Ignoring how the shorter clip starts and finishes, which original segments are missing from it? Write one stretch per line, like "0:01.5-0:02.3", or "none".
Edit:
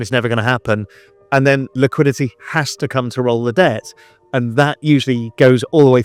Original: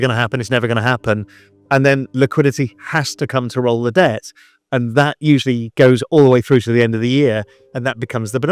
none